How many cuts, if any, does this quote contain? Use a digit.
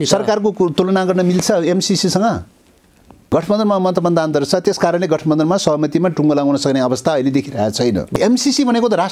2